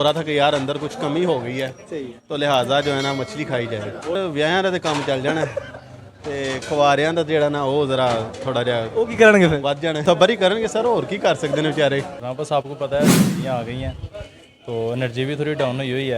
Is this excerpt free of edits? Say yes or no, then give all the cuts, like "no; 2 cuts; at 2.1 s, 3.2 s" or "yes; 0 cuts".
no; 3 cuts; at 4.2 s, 10.0 s, 12.3 s